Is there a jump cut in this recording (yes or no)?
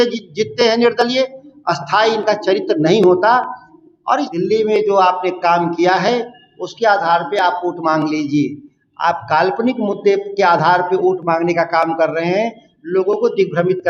yes